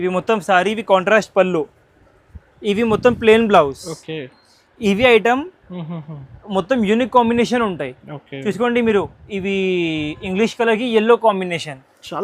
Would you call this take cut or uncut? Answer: uncut